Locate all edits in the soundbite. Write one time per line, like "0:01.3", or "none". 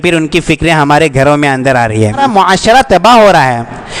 0:02.2